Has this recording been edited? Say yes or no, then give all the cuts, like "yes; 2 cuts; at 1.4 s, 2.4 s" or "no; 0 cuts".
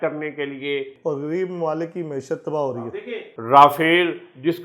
yes; 2 cuts; at 0.9 s, 2.8 s